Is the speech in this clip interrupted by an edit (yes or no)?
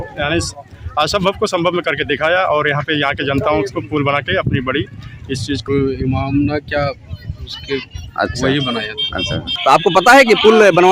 yes